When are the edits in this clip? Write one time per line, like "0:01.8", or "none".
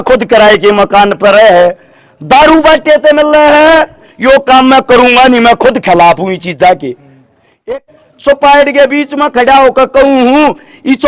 0:07.8